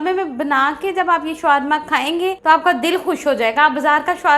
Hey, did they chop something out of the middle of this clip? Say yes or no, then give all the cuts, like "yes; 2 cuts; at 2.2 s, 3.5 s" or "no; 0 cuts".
yes; 1 cut; at 2.4 s